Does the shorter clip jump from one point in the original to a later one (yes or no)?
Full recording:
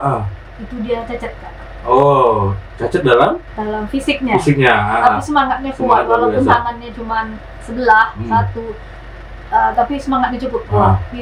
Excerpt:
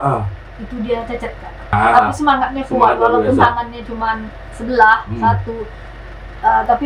yes